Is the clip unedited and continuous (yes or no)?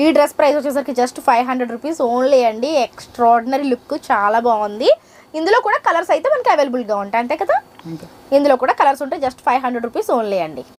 yes